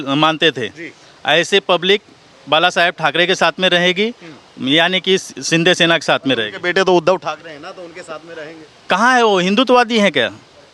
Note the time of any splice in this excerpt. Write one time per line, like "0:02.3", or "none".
none